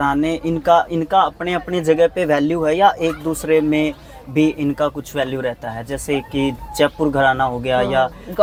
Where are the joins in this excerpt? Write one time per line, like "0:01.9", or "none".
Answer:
none